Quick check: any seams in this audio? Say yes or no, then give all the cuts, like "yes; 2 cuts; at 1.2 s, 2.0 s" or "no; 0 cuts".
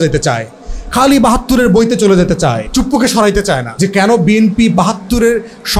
yes; 2 cuts; at 2.6 s, 3.7 s